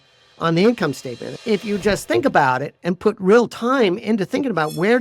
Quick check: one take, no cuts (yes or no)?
no